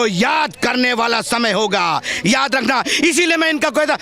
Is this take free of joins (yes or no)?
yes